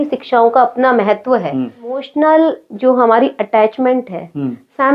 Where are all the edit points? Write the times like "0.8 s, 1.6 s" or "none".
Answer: 2.1 s